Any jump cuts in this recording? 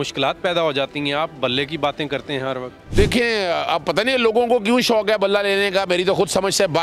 no; 0 cuts

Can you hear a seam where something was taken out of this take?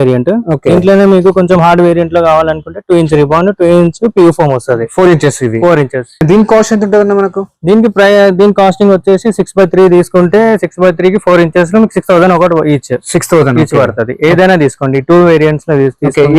yes; 1 cut; at 6.1 s

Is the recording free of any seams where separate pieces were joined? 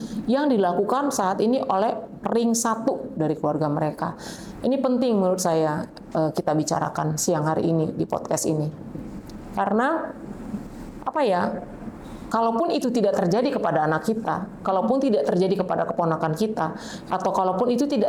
yes; 0 cuts

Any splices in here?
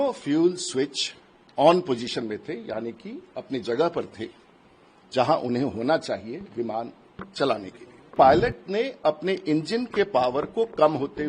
yes; 1 cut; at 8.1 s

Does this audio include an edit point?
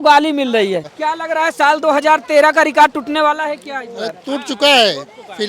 yes; 1 cut; at 0.9 s

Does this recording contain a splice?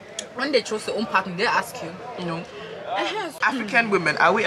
yes; 1 cut; at 3.3 s

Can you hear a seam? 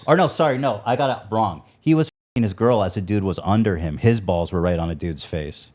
no; 0 cuts

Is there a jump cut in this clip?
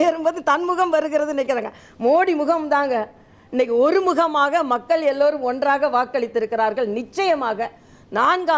no; 0 cuts

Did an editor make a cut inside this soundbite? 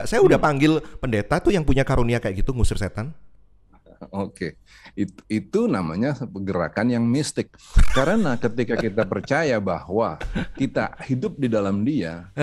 no; 0 cuts

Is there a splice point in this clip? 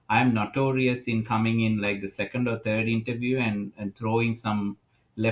no; 0 cuts

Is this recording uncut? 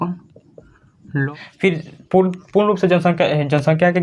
no; 1 cut; at 1.3 s

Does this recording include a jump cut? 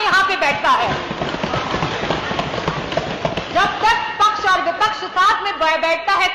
no; 0 cuts

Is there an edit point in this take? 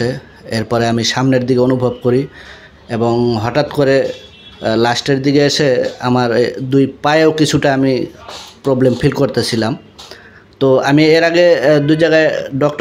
no; 0 cuts

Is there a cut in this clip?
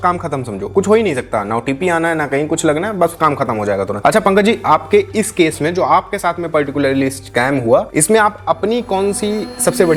no; 0 cuts

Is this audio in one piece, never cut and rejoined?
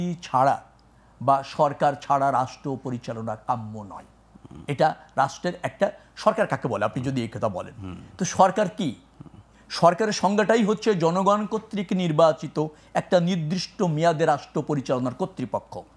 yes; 0 cuts

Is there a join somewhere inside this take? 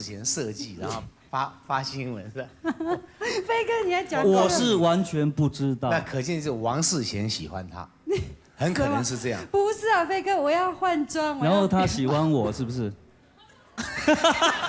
no; 0 cuts

